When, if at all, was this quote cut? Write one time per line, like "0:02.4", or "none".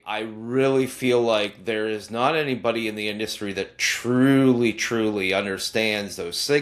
none

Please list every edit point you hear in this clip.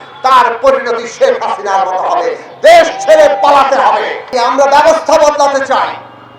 0:04.2

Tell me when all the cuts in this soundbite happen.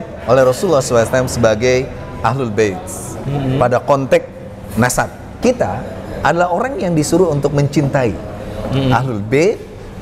0:05.2

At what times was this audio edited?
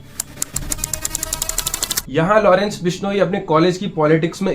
0:02.0

